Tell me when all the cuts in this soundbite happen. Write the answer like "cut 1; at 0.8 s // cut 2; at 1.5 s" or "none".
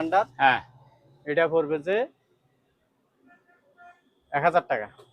none